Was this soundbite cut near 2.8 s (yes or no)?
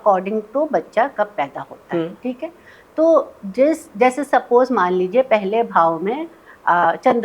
no